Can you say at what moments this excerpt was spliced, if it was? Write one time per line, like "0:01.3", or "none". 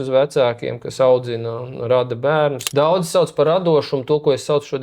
0:02.6